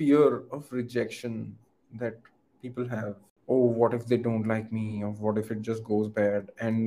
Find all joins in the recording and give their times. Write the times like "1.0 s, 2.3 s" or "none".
3.3 s